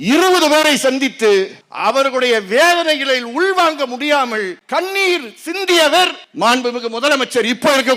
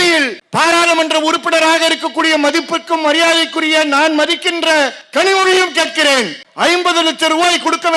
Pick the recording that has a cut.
first; 3 cuts; at 1.6 s, 4.6 s, 6.2 s

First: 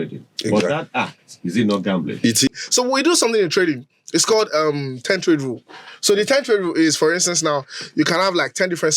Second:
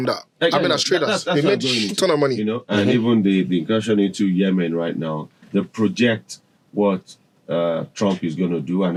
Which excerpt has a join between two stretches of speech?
first; 1 cut; at 2.6 s

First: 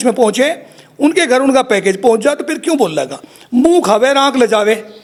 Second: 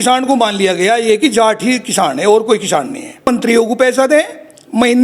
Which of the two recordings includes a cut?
second; 1 cut; at 3.3 s

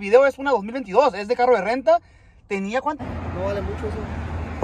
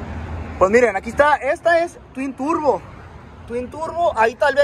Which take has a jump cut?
first; 1 cut; at 3.0 s

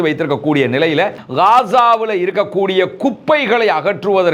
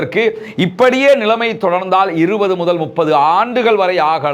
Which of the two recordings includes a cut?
first; 1 cut; at 1.2 s

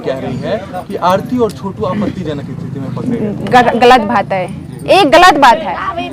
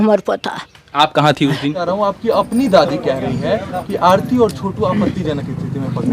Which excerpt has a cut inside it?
second; 1 cut; at 1.8 s

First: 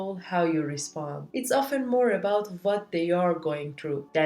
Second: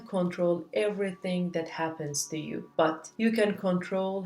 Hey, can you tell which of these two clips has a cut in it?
first; 1 cut; at 1.2 s

